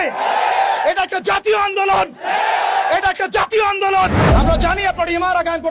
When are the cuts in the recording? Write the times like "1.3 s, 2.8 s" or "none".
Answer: 4.2 s